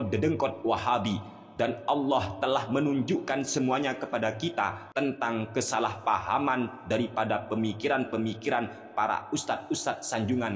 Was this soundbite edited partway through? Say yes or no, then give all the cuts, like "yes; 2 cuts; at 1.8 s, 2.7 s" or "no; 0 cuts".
yes; 1 cut; at 4.8 s